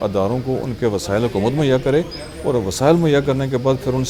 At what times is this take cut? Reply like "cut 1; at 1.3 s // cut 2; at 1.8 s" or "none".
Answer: none